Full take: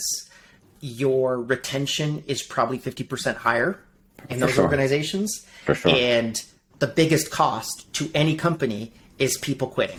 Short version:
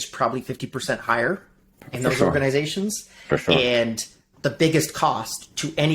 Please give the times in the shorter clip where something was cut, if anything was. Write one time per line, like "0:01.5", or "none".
none